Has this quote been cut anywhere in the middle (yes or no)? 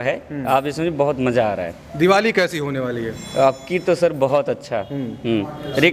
no